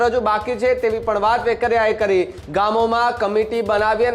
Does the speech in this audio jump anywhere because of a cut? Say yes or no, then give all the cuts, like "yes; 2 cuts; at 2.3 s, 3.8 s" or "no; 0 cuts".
yes; 1 cut; at 2.4 s